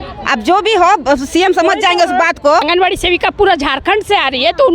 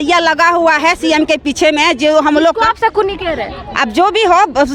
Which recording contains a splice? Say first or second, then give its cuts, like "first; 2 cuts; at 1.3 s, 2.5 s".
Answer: first; 1 cut; at 2.7 s